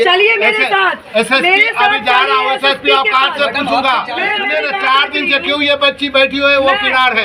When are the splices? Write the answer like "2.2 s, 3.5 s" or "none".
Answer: 4.4 s